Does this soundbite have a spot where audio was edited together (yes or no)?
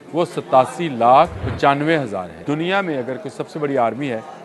yes